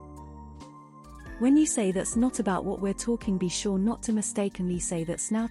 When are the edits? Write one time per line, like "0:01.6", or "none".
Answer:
0:01.4

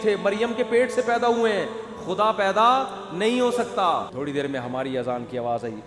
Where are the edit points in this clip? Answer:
0:04.1

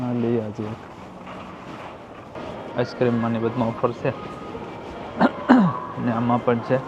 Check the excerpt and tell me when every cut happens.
0:02.3

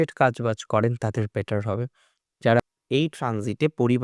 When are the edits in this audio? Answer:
0:02.6

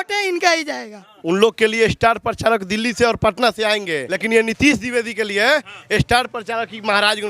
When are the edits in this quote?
0:01.1
0:04.1

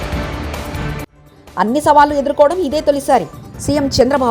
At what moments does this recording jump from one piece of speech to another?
0:01.1

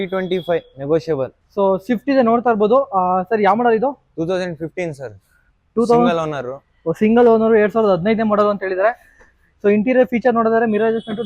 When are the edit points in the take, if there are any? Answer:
0:01.4

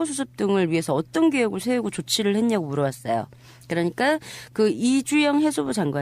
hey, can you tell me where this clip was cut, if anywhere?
0:03.0

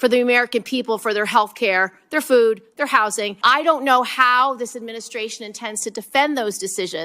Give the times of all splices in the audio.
0:03.4

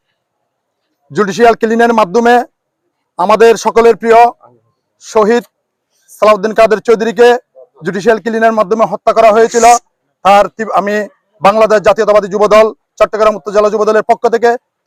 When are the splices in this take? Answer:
none

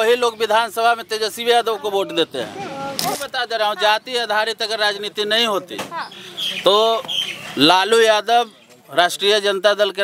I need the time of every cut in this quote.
0:03.1

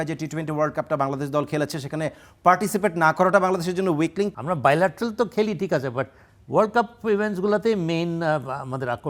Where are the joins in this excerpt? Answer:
0:04.3

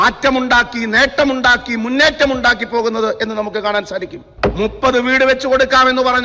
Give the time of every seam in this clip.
0:04.3

